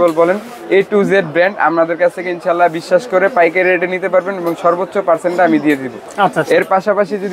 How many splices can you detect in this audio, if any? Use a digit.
0